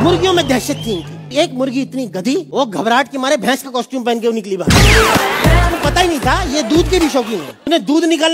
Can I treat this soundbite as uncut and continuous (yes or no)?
no